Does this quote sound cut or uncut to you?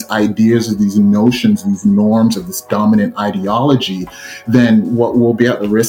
uncut